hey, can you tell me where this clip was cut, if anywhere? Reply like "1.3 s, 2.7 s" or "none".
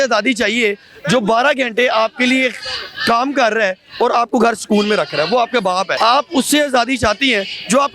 5.9 s